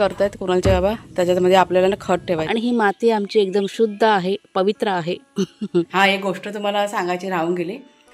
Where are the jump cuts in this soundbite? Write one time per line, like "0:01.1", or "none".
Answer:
0:02.4
0:05.9